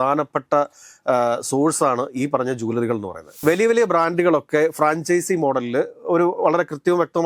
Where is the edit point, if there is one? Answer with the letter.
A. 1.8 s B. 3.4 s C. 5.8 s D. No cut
B